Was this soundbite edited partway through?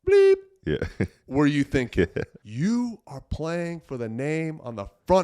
yes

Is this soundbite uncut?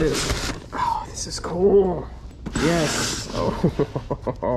no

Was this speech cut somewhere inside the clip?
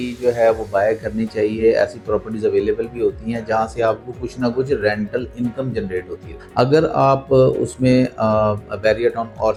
no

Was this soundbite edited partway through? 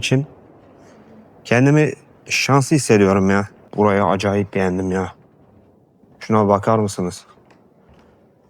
yes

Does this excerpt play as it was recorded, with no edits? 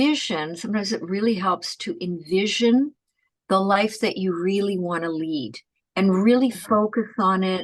yes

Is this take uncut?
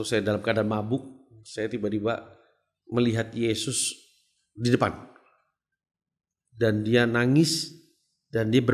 yes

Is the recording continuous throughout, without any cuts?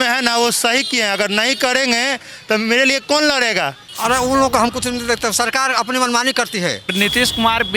no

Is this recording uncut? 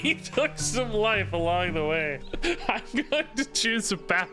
no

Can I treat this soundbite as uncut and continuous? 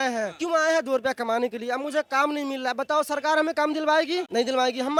yes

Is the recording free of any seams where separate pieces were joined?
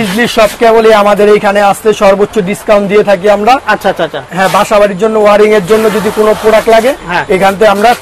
yes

